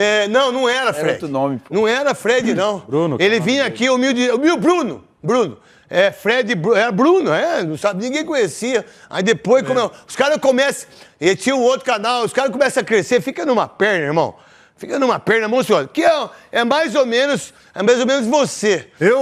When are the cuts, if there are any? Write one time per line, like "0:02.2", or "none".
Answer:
none